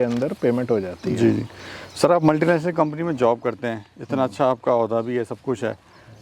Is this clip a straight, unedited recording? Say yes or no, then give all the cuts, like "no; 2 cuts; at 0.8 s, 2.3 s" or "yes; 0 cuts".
yes; 0 cuts